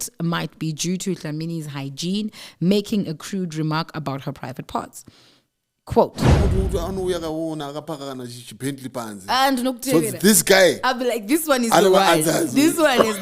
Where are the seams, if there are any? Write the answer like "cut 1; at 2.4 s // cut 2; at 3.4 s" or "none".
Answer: cut 1; at 6.4 s